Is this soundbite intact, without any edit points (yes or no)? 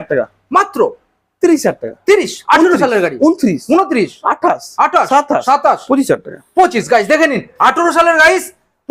yes